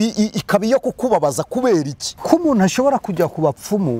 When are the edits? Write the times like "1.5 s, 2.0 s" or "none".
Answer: 2.1 s